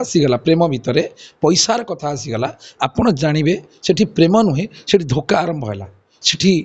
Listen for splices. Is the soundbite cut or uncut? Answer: uncut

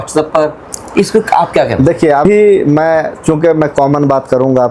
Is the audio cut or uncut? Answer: uncut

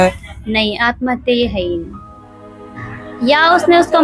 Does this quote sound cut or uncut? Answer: uncut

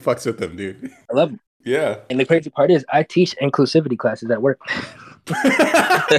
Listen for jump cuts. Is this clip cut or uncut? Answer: cut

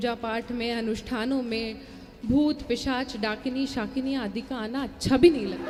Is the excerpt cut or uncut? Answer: uncut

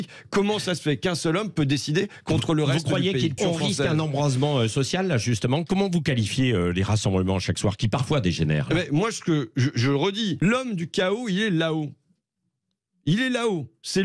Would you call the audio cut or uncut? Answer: cut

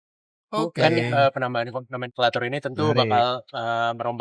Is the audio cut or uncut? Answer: uncut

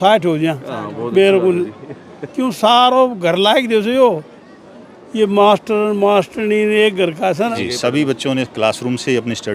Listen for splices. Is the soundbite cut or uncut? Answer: cut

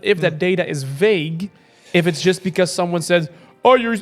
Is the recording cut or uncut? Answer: uncut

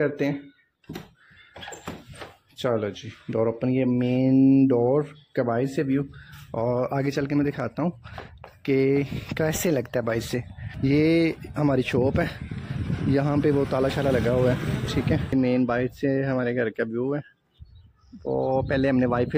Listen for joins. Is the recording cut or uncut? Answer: uncut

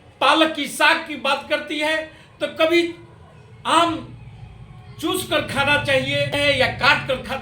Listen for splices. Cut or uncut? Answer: cut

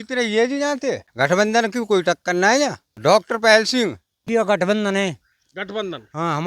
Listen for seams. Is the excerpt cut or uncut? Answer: cut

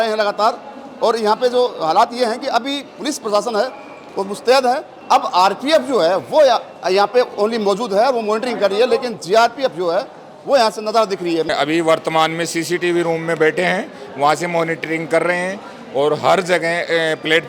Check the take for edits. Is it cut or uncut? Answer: cut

